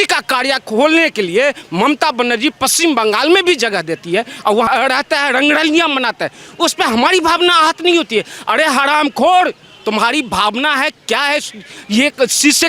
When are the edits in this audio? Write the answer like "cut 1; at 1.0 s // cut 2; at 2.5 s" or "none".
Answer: cut 1; at 4.7 s